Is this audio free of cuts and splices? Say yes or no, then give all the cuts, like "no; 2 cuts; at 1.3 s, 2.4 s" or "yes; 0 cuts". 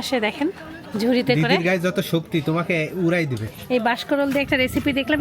no; 1 cut; at 3.4 s